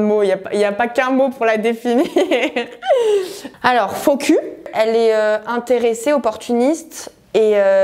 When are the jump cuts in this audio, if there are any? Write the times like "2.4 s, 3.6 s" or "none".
3.4 s